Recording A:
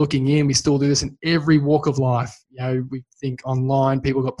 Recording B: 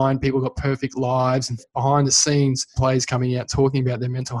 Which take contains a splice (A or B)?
B